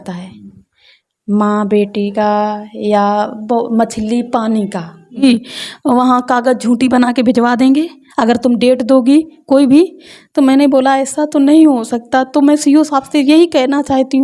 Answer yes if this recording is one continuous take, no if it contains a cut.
no